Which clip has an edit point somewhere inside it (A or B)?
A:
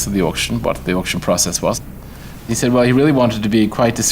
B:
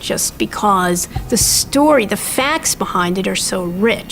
A